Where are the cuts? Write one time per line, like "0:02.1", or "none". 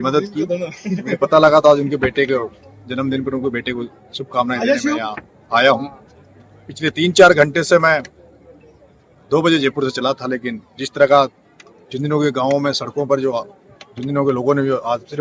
none